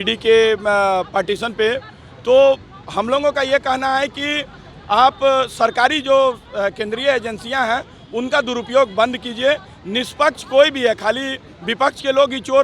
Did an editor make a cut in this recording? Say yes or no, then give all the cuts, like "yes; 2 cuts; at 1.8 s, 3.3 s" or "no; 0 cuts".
no; 0 cuts